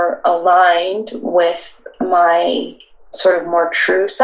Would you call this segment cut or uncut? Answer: uncut